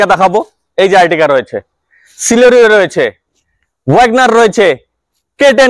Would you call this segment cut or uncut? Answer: uncut